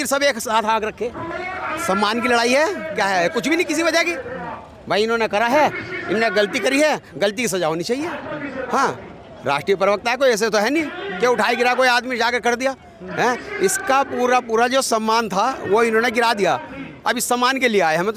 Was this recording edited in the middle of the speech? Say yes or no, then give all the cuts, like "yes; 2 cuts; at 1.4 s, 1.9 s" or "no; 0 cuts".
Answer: yes; 1 cut; at 1.3 s